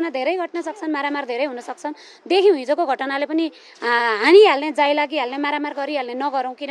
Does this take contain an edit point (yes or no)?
no